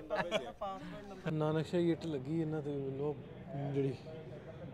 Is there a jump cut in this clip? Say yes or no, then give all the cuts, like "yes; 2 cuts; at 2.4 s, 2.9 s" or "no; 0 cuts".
yes; 1 cut; at 1.3 s